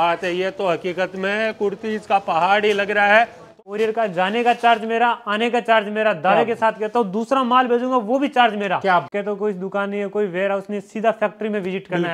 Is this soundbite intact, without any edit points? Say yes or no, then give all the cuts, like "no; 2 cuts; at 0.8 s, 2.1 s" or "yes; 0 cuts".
no; 2 cuts; at 3.4 s, 9.1 s